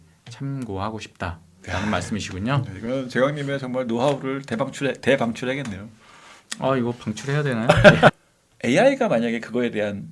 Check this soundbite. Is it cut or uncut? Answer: cut